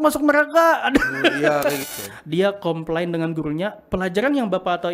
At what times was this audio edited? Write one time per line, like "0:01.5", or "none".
0:01.8